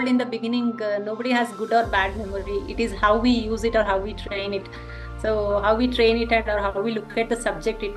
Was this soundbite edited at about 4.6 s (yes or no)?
no